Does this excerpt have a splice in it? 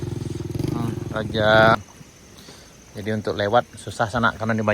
yes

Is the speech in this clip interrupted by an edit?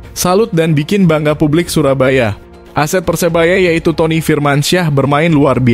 no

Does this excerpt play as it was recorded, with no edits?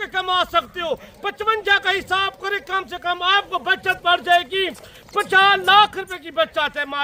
yes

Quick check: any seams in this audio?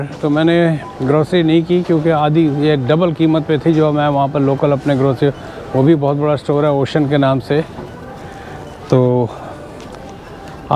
no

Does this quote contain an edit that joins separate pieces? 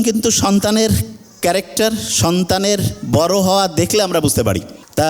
no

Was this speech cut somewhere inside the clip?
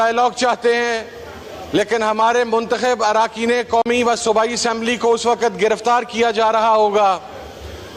no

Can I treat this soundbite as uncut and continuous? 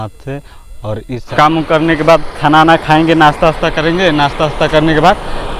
no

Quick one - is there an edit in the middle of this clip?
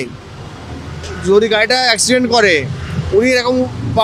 no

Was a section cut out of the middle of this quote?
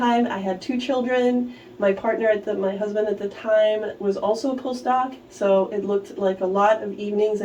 no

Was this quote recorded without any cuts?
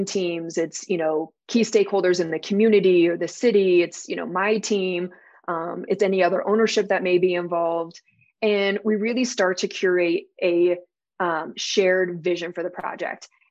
no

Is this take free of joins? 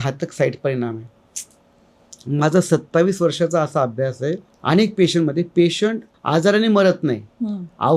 no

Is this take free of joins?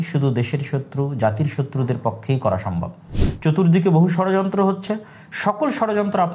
no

